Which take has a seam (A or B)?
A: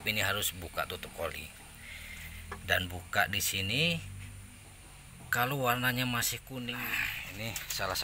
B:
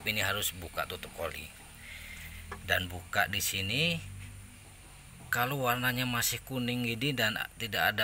A